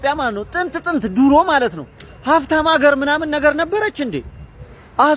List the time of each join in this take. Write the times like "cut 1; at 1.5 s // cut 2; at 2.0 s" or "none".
none